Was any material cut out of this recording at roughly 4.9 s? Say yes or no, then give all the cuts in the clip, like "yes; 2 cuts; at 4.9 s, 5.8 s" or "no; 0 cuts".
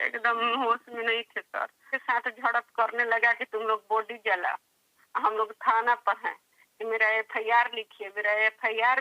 no; 1 cut; at 1.9 s